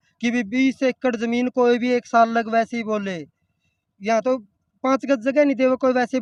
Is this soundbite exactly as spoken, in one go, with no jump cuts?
yes; 0 cuts

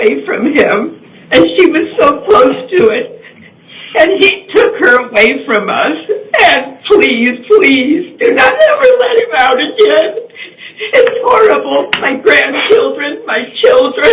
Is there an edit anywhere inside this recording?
no; 0 cuts

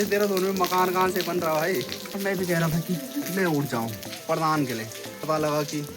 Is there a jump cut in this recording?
yes; 3 cuts; at 2.1 s, 4.1 s, 5.1 s

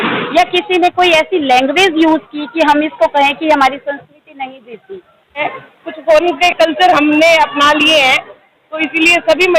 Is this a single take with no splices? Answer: no; 1 cut; at 5.5 s

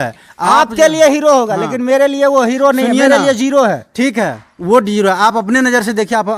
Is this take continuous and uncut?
yes; 0 cuts

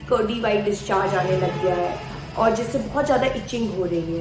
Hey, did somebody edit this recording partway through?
no; 0 cuts

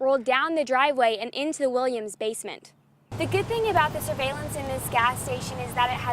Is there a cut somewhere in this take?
yes; 1 cut; at 3.0 s

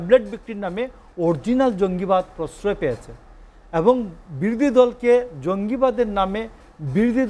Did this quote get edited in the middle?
no; 0 cuts

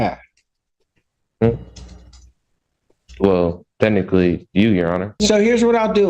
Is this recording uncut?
no; 1 cut; at 5.2 s

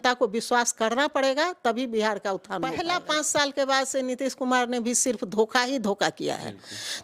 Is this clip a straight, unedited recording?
no; 1 cut; at 2.6 s

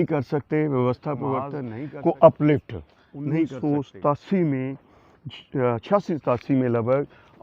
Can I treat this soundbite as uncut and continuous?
no; 2 cuts; at 1.6 s, 3.5 s

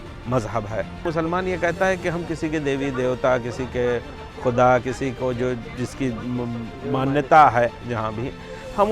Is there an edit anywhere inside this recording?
yes; 1 cut; at 1.0 s

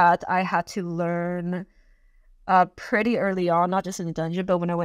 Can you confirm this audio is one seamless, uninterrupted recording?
yes; 0 cuts

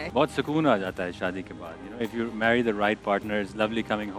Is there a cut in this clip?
no; 0 cuts

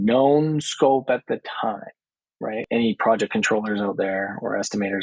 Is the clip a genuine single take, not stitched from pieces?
no; 1 cut; at 2.7 s

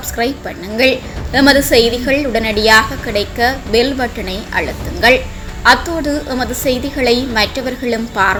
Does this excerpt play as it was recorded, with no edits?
yes; 0 cuts

